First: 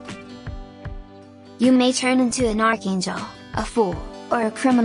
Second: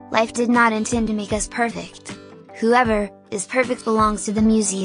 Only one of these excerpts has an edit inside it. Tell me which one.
first; 1 cut; at 1.0 s

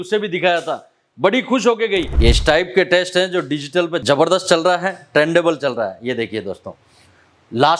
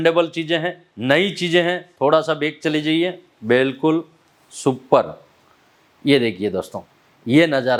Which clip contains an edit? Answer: first; 2 cuts; at 2.1 s, 4.0 s

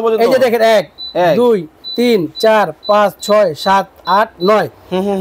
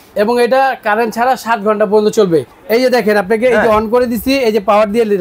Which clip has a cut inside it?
second; 1 cut; at 2.5 s

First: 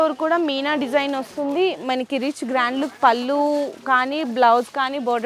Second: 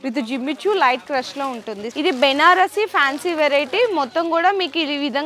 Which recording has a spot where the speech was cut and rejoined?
second; 1 cut; at 1.8 s

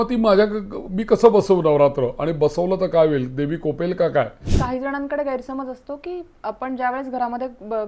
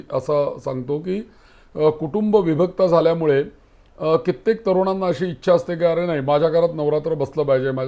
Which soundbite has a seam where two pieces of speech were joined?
first; 1 cut; at 4.5 s

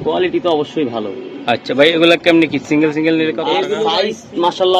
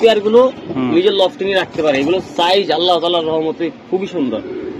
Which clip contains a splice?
first; 1 cut; at 3.8 s

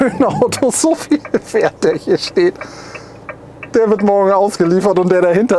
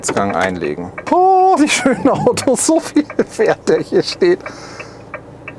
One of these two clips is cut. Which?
second; 1 cut; at 0.9 s

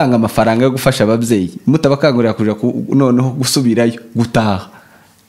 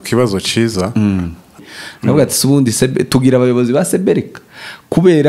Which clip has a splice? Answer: second; 1 cut; at 1.6 s

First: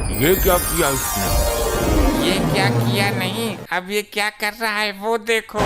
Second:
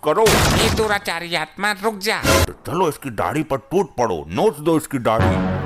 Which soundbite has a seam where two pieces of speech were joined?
second; 1 cut; at 2.5 s

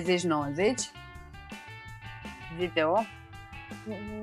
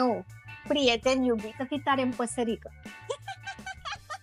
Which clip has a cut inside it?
second; 1 cut; at 1.4 s

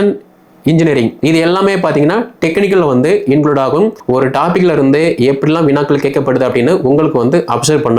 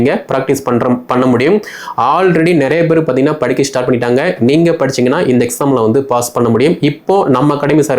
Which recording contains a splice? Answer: first; 1 cut; at 4.0 s

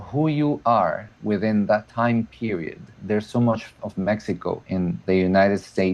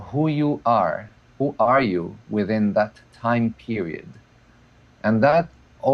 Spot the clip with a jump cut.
first; 4 cuts; at 1.1 s, 1.9 s, 3.0 s, 4.7 s

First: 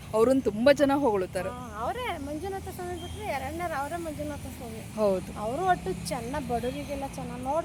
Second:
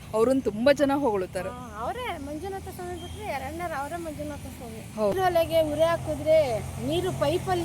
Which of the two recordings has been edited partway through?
second; 1 cut; at 5.1 s

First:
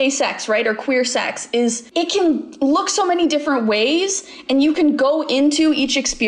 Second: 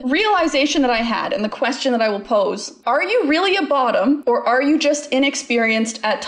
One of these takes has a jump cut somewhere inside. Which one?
second; 2 cuts; at 2.7 s, 4.2 s

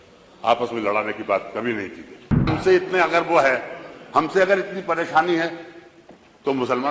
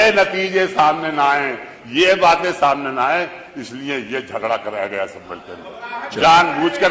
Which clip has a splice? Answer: first; 1 cut; at 2.5 s

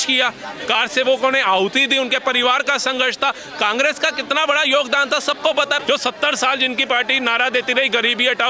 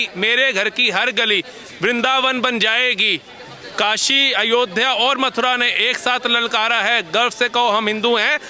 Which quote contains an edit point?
first; 1 cut; at 5.8 s

